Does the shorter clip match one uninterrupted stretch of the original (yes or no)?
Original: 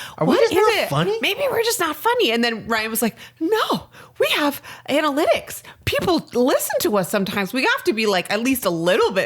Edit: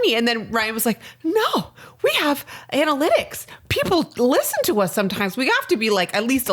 yes